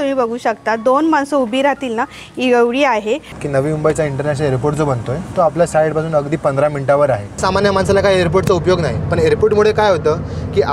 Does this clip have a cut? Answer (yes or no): yes